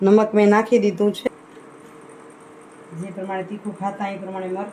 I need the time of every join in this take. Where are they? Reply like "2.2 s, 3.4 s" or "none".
1.3 s

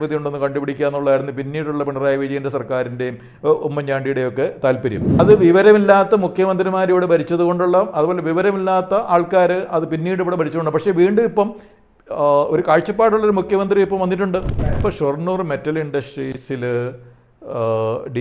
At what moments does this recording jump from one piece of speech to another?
5.2 s, 14.8 s

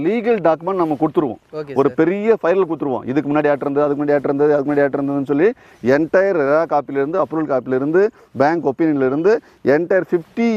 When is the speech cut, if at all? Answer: none

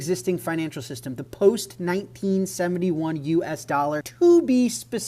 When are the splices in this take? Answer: 4.1 s

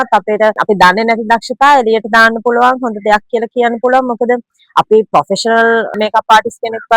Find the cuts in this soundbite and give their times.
none

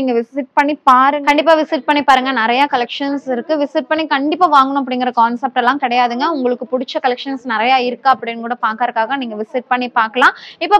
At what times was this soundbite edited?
none

